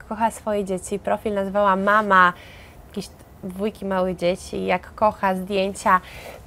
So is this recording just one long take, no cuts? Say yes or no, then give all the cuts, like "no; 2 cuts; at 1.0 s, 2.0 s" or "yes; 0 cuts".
yes; 0 cuts